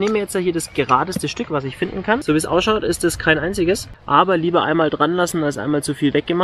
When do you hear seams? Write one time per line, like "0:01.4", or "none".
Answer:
0:02.2
0:03.9